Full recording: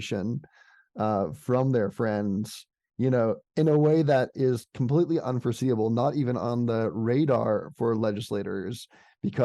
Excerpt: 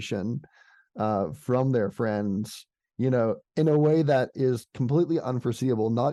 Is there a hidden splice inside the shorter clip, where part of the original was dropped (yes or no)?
no